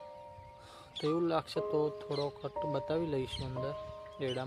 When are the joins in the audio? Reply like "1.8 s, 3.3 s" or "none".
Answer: none